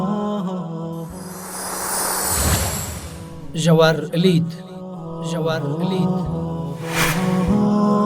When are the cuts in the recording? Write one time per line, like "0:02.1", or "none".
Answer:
0:01.0